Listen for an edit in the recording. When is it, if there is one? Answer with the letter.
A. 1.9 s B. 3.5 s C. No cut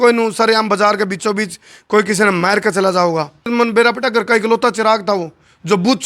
B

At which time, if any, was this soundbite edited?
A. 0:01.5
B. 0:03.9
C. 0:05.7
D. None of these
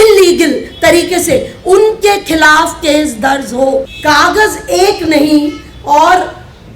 B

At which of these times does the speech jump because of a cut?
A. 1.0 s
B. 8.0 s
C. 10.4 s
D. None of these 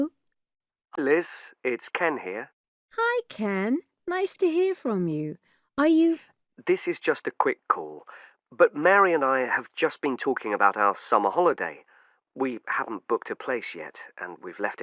A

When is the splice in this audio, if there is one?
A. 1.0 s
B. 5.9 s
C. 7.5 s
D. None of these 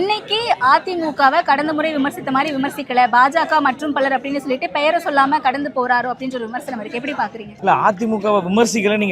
C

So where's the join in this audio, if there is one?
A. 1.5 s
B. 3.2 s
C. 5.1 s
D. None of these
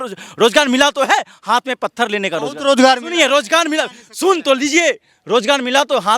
D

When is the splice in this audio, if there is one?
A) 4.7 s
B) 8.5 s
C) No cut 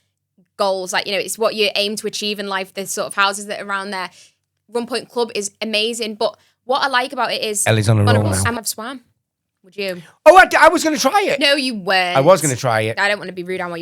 B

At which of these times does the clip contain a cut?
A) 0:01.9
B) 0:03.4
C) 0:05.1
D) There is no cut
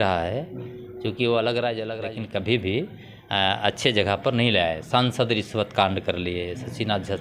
A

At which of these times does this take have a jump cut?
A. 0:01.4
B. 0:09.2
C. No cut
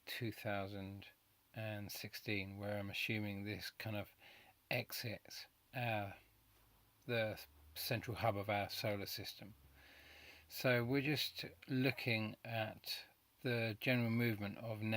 B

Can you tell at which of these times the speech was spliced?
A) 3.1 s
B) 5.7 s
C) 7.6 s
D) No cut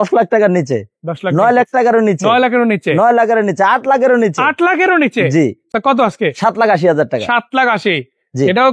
D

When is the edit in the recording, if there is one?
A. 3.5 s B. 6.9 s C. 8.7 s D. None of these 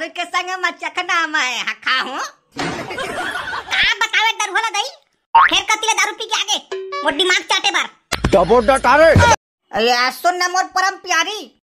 D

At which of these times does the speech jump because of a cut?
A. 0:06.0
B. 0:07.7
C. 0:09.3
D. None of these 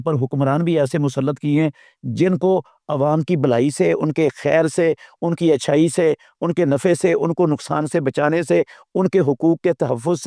D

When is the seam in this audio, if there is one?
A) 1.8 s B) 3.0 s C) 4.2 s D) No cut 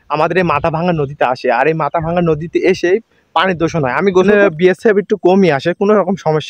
C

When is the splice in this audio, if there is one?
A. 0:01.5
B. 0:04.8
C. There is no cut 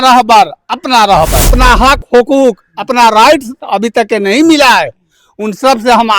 A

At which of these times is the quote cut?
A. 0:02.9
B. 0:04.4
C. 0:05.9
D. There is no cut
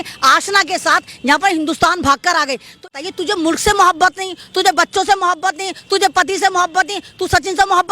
A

